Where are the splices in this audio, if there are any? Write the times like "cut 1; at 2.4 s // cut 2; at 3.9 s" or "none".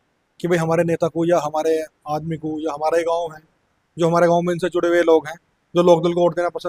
none